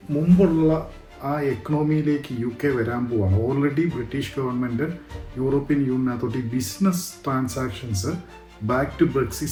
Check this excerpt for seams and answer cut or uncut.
uncut